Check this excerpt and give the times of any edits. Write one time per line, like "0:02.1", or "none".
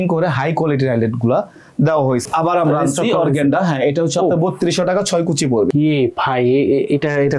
0:02.2
0:05.7